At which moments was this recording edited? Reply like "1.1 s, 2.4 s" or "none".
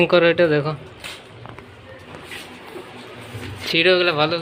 none